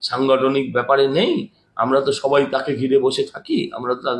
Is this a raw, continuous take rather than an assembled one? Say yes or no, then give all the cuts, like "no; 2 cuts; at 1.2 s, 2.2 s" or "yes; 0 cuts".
yes; 0 cuts